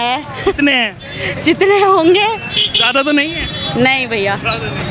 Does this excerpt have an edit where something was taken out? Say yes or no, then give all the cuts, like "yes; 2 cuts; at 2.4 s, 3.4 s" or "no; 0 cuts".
no; 0 cuts